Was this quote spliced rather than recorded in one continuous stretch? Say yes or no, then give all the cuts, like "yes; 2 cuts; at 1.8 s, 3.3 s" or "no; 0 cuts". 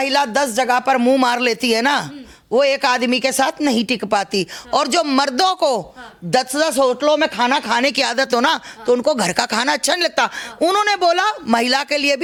no; 0 cuts